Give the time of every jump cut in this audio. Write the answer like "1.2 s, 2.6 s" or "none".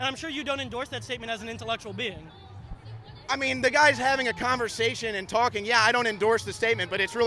none